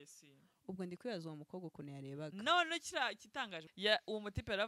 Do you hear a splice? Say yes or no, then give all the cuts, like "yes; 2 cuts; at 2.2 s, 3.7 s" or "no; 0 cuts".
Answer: yes; 1 cut; at 3.6 s